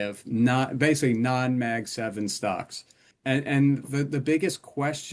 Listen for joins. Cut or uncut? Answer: cut